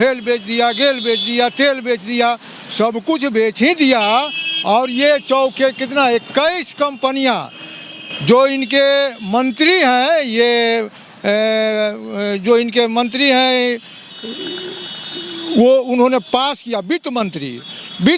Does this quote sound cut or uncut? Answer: uncut